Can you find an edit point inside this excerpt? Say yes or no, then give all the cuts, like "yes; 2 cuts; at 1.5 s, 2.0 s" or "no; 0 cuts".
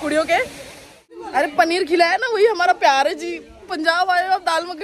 yes; 1 cut; at 1.1 s